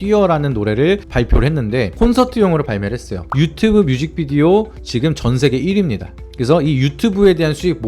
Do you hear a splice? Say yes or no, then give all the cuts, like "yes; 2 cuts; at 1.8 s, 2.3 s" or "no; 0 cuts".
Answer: yes; 1 cut; at 3.2 s